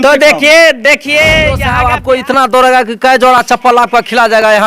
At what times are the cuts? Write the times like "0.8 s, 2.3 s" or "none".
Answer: 1.7 s